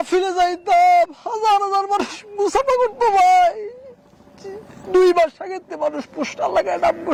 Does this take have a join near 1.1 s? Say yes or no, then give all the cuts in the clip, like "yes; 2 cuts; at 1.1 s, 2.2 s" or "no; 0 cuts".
no; 0 cuts